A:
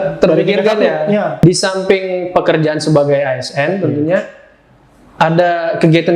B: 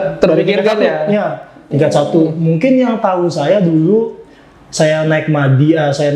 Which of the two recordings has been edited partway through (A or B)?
A